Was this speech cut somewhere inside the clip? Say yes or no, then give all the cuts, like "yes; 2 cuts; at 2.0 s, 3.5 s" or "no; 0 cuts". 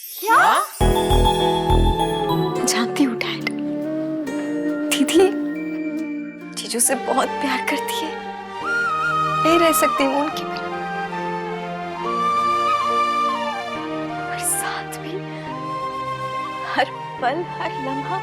yes; 1 cut; at 2.3 s